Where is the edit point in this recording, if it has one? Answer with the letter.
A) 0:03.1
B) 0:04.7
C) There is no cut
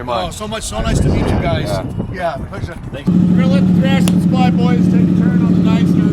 A